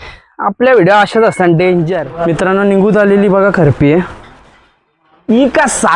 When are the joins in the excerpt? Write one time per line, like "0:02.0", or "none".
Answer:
0:02.0